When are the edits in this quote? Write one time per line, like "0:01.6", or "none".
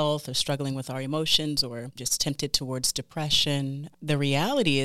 0:02.0
0:03.8